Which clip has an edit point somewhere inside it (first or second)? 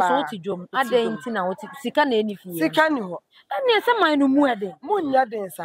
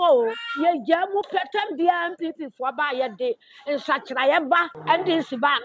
second